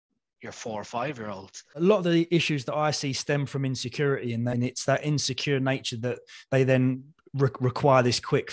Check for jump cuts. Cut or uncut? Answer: cut